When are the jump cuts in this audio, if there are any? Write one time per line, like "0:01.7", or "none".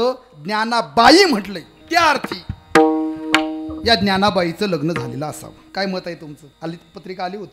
0:01.7
0:05.5
0:06.4